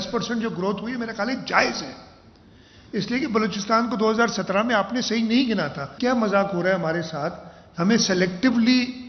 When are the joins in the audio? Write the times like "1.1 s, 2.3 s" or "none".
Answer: 5.9 s